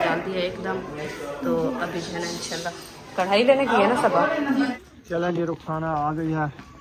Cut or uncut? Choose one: cut